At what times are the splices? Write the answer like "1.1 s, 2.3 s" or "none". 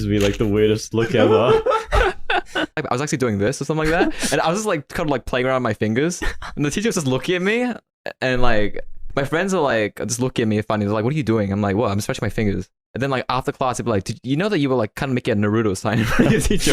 2.8 s